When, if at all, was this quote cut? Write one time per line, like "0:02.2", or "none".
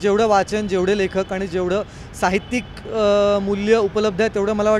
none